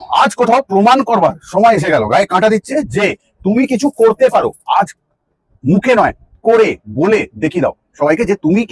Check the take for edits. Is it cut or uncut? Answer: uncut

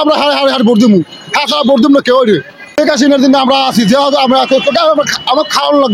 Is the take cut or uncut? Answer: cut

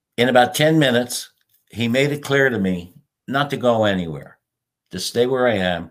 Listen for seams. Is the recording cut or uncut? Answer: uncut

